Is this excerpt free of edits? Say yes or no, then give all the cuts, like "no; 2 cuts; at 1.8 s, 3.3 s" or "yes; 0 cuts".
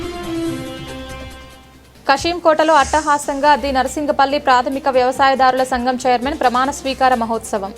no; 1 cut; at 1.5 s